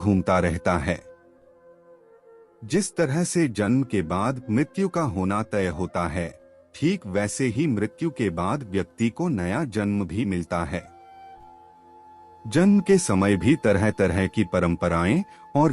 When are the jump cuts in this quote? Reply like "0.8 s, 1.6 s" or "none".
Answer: 10.9 s, 12.3 s